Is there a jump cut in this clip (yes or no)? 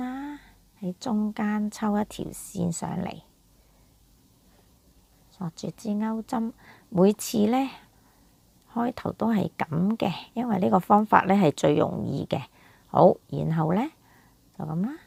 no